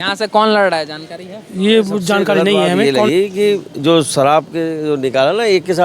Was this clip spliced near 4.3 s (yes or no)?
no